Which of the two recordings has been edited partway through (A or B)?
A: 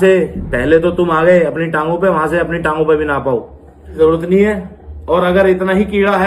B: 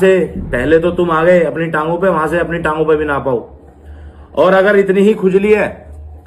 A